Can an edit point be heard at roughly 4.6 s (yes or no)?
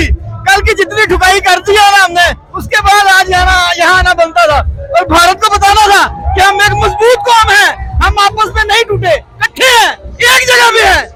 no